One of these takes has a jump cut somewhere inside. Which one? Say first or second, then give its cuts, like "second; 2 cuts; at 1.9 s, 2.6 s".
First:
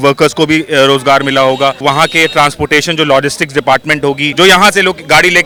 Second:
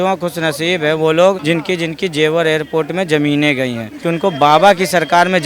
second; 2 cuts; at 1.4 s, 3.9 s